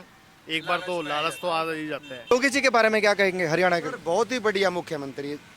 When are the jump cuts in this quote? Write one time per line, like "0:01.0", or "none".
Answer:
0:02.3